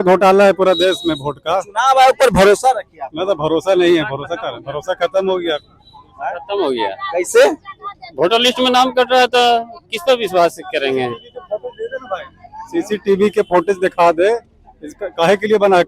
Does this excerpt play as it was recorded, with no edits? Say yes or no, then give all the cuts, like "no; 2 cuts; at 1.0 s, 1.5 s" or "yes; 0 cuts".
yes; 0 cuts